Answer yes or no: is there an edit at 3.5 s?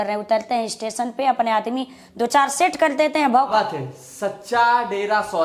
yes